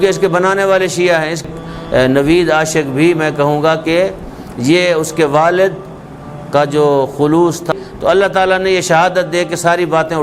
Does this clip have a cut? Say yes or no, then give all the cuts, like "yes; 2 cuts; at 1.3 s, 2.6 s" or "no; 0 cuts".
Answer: yes; 2 cuts; at 1.5 s, 7.7 s